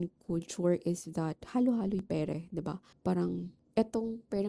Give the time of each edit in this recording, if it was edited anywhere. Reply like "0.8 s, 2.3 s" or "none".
2.9 s, 3.6 s